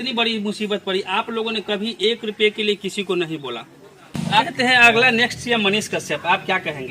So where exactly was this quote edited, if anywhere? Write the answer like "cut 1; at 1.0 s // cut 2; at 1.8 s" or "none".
cut 1; at 4.4 s